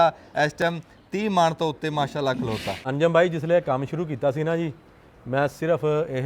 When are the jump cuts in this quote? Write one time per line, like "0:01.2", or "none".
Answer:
0:02.8